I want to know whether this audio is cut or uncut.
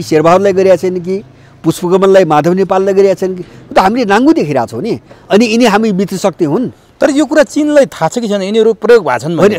uncut